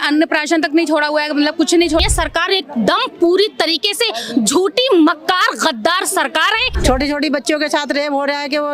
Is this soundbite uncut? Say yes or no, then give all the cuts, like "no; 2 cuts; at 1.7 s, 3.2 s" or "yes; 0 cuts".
no; 2 cuts; at 2.1 s, 6.8 s